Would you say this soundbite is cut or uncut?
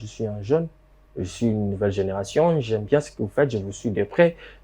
uncut